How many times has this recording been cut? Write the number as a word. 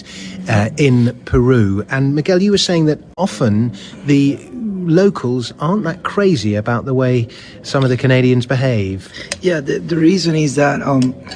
one